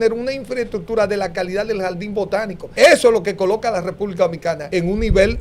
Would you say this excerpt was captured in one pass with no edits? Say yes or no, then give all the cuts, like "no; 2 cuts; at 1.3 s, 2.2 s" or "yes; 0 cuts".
no; 2 cuts; at 2.6 s, 4.6 s